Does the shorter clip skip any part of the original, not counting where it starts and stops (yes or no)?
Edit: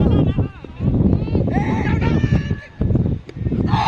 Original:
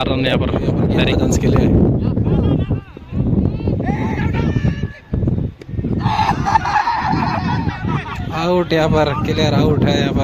no